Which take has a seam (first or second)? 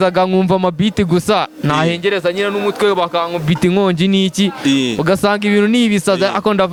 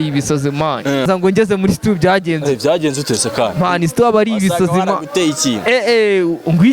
second